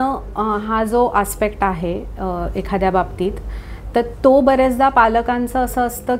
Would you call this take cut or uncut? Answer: uncut